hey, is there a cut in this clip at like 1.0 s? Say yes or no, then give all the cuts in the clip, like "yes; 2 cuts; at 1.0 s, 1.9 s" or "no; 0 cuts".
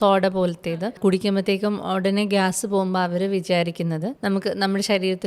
yes; 2 cuts; at 1.0 s, 4.1 s